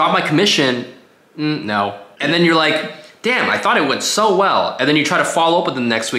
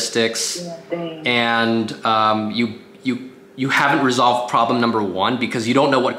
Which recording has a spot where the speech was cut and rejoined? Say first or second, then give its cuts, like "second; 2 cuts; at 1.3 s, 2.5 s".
first; 1 cut; at 2.1 s